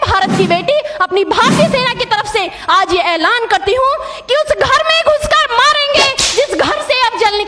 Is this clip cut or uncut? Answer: uncut